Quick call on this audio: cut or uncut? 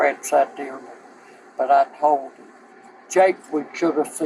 uncut